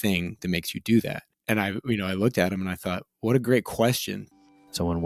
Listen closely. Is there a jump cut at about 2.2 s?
no; 1 cut; at 4.1 s

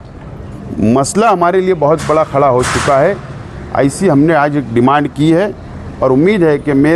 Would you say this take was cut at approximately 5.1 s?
no; 0 cuts

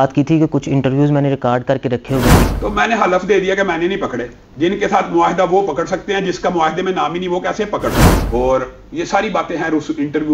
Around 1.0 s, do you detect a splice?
no; 2 cuts; at 2.4 s, 8.1 s

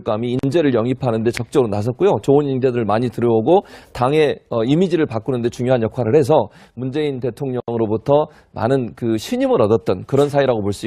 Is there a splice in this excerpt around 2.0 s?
yes; 1 cut; at 2.0 s

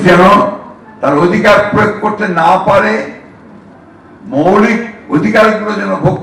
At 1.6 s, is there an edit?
no; 0 cuts

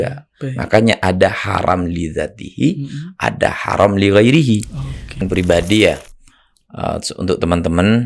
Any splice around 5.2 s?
yes; 1 cut; at 5.2 s

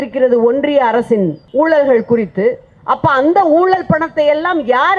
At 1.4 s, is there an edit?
yes; 1 cut; at 1.4 s

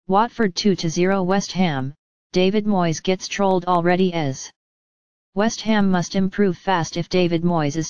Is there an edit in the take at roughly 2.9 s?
no; 1 cut; at 1.1 s

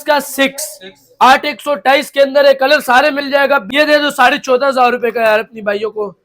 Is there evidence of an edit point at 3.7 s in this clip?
yes; 1 cut; at 3.7 s

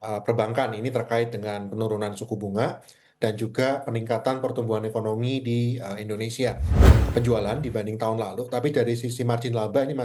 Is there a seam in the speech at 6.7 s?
yes; 1 cut; at 6.7 s

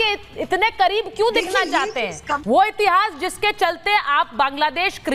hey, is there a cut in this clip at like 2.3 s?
yes; 1 cut; at 2.3 s

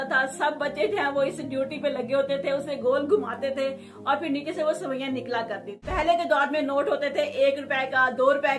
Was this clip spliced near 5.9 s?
yes; 1 cut; at 5.9 s

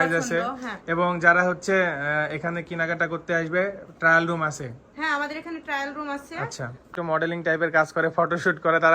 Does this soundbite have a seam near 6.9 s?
yes; 1 cut; at 6.9 s

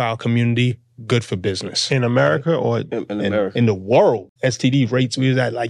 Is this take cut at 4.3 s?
yes; 1 cut; at 4.3 s

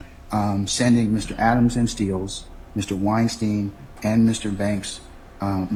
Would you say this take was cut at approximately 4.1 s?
no; 0 cuts

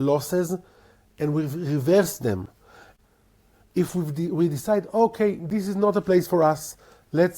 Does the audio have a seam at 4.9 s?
no; 1 cut; at 2.9 s

